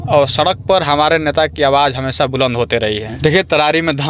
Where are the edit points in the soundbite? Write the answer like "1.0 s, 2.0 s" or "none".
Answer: 3.1 s